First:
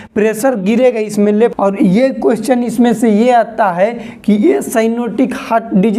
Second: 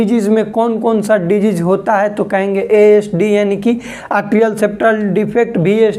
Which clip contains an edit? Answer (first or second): first